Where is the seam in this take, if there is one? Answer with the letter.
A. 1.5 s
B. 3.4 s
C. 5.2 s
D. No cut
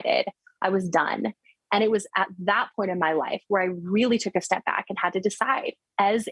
A